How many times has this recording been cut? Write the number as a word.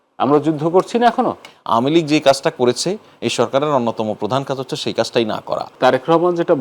two